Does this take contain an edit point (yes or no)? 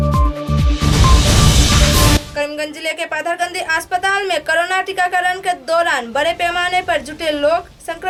no